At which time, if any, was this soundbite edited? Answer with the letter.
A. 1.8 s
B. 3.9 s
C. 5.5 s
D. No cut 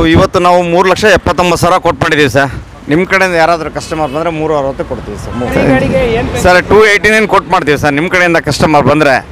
C